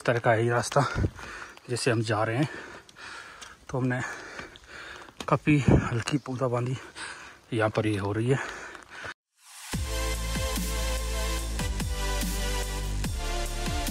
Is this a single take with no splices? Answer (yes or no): yes